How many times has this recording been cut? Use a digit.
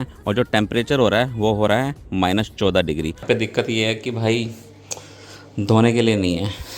1